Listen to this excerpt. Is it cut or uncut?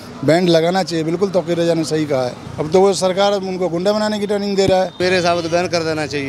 cut